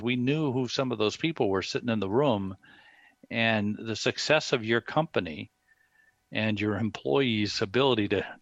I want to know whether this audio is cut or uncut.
uncut